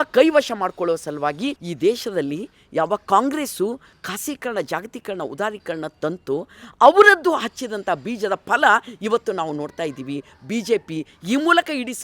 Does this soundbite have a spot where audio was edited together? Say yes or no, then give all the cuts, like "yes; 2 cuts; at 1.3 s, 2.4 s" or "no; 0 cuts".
yes; 1 cut; at 1.6 s